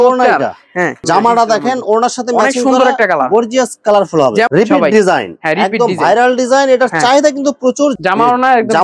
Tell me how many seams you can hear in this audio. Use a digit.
3